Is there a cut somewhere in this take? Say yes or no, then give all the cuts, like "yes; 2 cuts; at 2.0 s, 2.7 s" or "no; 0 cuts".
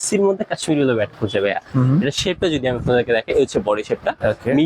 yes; 1 cut; at 1.7 s